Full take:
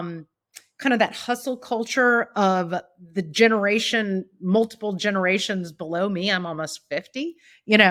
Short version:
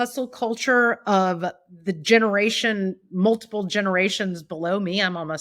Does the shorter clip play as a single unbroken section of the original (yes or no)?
yes